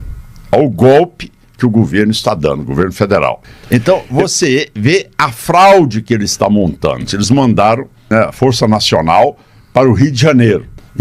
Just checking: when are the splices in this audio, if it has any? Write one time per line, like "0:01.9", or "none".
0:03.5
0:07.1
0:08.0